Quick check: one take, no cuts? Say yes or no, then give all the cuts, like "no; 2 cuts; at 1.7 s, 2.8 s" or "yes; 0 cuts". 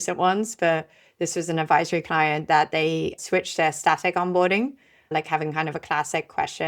no; 2 cuts; at 3.2 s, 5.1 s